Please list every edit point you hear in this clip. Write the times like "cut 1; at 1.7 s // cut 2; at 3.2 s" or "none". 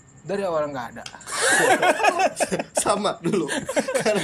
none